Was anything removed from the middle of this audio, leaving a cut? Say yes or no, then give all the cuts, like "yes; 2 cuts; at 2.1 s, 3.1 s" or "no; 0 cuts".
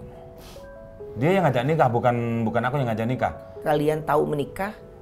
yes; 1 cut; at 3.5 s